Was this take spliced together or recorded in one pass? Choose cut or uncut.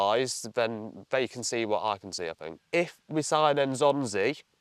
cut